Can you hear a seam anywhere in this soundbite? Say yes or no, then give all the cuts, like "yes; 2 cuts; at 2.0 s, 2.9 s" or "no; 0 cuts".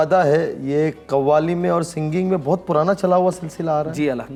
no; 0 cuts